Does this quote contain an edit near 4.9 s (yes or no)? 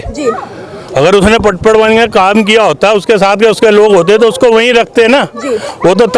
no